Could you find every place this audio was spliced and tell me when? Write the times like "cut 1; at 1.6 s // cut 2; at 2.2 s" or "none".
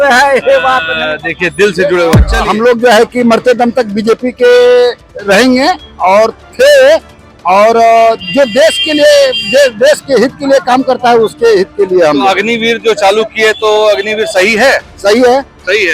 cut 1; at 2.3 s // cut 2; at 5.1 s